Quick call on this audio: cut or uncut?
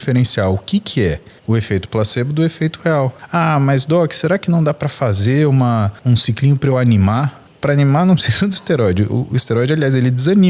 cut